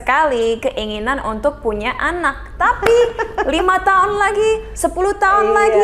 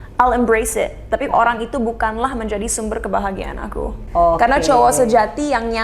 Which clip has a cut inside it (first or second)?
second